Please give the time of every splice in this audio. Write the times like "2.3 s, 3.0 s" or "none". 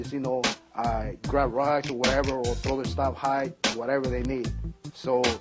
2.9 s